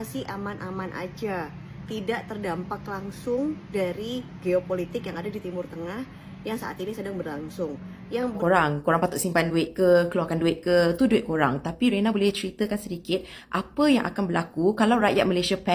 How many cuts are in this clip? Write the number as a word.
one